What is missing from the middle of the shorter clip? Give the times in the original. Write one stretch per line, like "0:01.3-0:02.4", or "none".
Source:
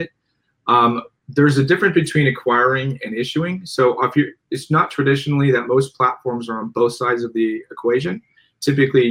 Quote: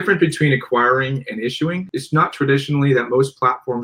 0:03.6-0:04.4